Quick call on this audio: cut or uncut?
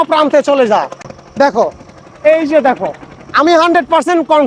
uncut